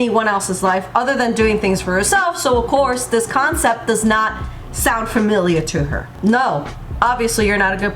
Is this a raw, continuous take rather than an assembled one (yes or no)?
no